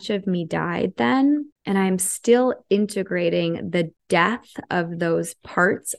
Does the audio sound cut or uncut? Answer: cut